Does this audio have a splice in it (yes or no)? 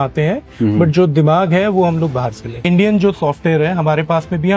yes